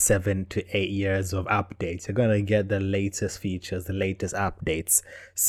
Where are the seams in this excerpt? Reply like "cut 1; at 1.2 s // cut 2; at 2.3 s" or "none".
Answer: none